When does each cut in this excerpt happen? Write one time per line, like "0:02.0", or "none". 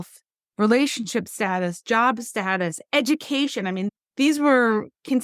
0:03.9